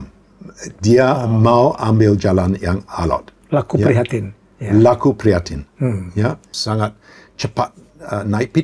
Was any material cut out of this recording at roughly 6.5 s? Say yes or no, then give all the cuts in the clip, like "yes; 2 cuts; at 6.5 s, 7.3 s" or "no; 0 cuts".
yes; 1 cut; at 6.5 s